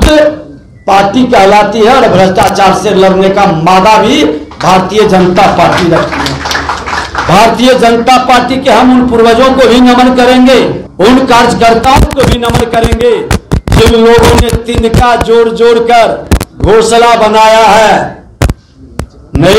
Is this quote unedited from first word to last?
yes; 0 cuts

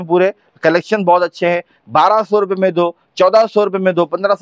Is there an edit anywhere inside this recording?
no; 0 cuts

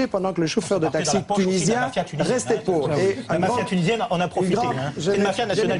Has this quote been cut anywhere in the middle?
no; 0 cuts

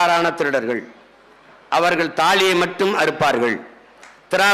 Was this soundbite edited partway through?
no; 0 cuts

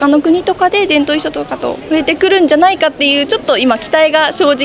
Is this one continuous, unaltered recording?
yes; 0 cuts

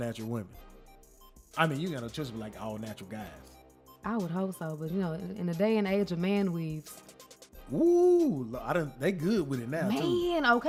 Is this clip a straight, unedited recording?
yes; 0 cuts

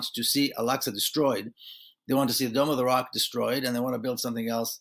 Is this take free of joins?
yes; 0 cuts

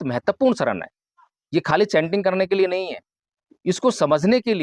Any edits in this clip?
no; 0 cuts

